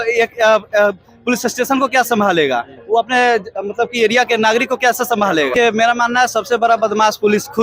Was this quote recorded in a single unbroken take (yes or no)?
no